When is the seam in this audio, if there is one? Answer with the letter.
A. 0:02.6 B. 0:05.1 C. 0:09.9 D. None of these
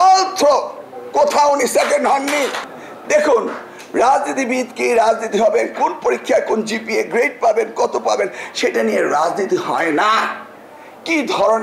A